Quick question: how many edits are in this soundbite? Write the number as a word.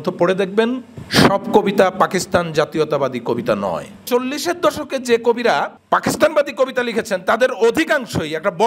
three